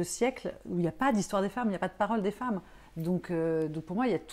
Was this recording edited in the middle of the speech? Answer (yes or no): no